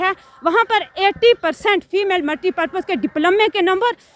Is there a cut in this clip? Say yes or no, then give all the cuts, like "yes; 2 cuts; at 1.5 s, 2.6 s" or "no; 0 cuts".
no; 0 cuts